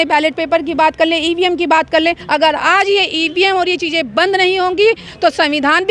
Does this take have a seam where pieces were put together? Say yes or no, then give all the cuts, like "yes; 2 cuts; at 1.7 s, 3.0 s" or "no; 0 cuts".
yes; 1 cut; at 2.2 s